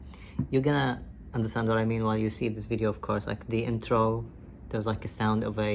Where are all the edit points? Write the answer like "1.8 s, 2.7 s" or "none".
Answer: none